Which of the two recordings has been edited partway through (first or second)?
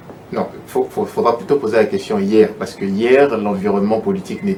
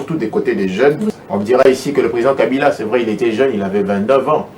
second